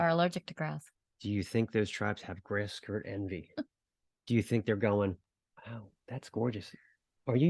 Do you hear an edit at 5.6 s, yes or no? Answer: no